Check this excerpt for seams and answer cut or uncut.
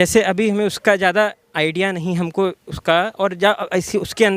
uncut